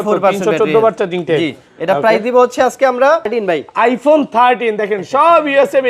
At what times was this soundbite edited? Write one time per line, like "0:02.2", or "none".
0:03.3